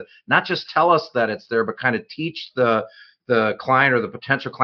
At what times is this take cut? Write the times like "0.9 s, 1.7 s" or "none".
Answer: none